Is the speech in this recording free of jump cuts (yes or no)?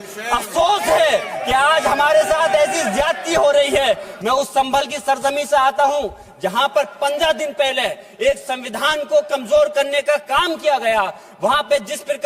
no